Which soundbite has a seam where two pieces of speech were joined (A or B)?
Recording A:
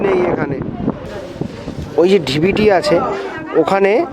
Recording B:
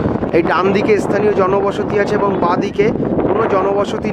A